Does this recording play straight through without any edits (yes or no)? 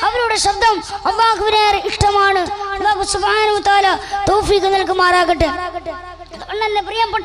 yes